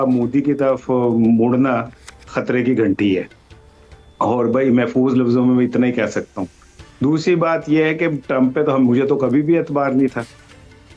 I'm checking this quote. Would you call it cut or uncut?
uncut